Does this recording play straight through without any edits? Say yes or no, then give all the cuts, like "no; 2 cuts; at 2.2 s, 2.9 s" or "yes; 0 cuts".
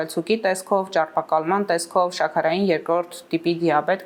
yes; 0 cuts